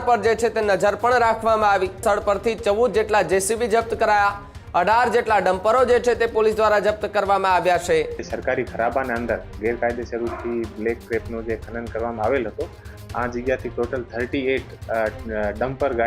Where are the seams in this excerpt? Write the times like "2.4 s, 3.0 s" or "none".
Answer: 2.0 s, 8.2 s

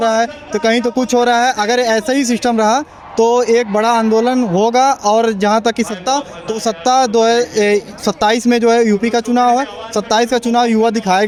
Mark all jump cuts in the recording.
none

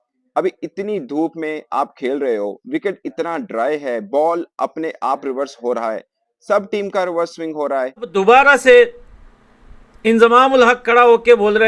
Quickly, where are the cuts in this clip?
8.1 s

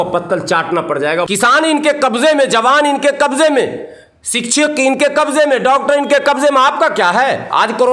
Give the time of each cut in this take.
1.3 s

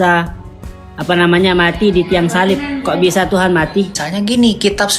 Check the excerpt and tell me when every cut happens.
4.0 s

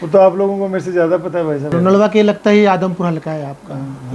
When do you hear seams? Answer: 1.7 s

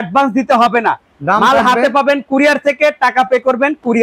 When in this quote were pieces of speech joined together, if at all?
none

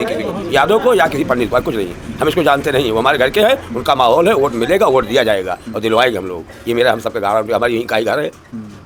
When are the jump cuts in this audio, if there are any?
none

